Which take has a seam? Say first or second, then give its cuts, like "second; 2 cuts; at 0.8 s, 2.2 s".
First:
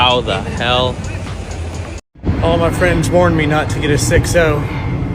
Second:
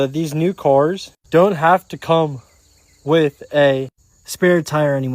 first; 1 cut; at 2.1 s